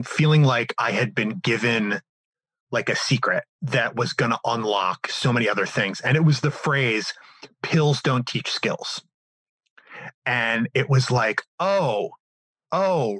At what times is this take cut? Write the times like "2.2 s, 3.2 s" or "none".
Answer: 3.6 s